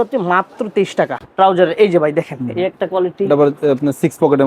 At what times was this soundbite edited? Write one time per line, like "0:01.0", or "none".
0:01.2